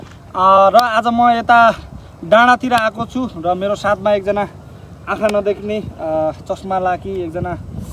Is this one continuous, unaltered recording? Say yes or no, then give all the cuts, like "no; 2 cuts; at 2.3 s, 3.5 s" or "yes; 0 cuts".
yes; 0 cuts